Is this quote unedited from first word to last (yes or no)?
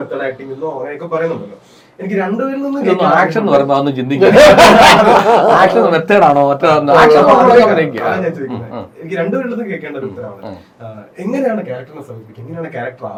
yes